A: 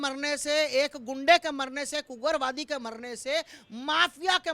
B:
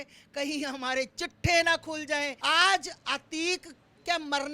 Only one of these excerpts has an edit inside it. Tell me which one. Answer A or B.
B